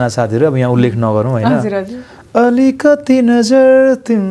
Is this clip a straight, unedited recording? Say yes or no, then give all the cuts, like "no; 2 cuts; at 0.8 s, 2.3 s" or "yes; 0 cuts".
yes; 0 cuts